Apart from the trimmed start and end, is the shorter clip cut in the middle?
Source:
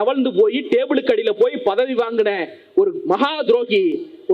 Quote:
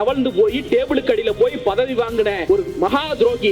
yes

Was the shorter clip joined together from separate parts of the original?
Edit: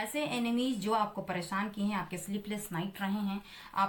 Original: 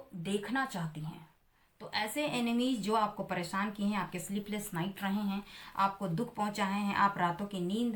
no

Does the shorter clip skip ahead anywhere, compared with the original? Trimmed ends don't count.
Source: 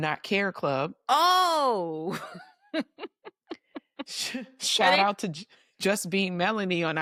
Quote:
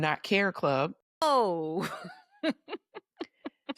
yes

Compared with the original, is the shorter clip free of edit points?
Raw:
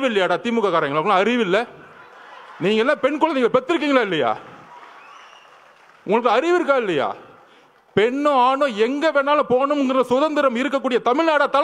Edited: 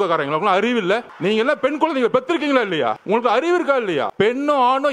no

